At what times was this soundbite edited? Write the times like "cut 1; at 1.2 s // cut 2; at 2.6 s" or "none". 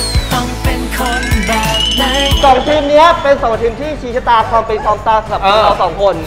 cut 1; at 2.3 s